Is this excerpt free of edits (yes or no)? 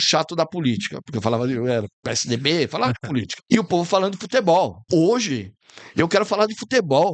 no